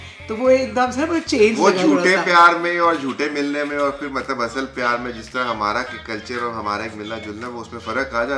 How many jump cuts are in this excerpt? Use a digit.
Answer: 0